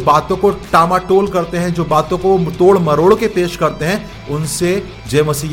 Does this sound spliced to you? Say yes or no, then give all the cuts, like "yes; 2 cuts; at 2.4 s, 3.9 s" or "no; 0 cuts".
no; 0 cuts